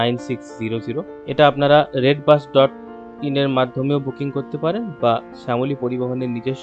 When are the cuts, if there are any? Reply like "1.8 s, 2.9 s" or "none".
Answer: 1.1 s